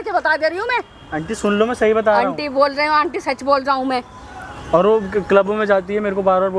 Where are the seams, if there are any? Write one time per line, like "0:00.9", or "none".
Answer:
none